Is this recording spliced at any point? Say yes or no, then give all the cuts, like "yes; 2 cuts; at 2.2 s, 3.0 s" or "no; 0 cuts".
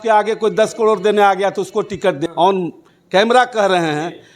yes; 1 cut; at 2.2 s